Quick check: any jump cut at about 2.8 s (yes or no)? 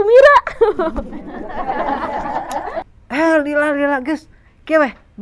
yes